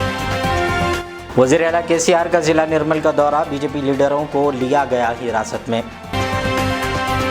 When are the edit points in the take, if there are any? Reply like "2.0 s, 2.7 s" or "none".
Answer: none